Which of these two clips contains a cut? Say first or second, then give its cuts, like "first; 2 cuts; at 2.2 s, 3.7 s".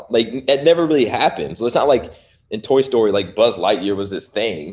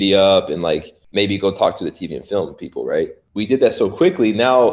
second; 2 cuts; at 1.0 s, 3.2 s